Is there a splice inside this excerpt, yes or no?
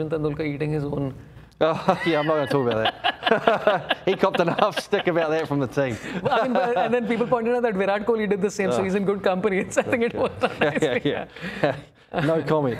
no